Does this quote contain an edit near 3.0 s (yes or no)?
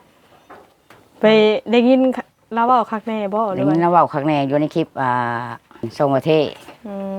no